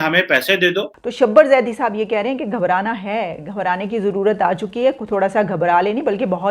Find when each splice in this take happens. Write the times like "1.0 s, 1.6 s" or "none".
1.0 s